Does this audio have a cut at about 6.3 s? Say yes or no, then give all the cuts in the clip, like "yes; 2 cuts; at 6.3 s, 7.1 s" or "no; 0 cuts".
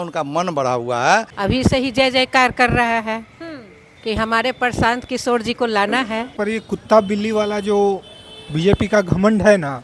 yes; 2 cuts; at 1.3 s, 6.3 s